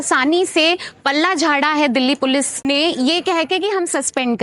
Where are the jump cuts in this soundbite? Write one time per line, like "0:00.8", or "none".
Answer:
0:02.6